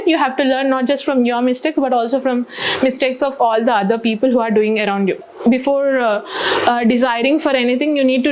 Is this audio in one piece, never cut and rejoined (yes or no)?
no